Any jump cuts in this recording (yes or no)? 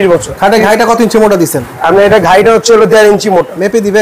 no